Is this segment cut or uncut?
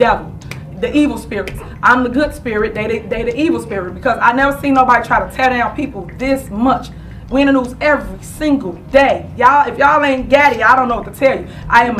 cut